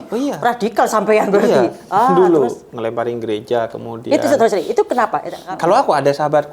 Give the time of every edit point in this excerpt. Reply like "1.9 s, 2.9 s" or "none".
5.3 s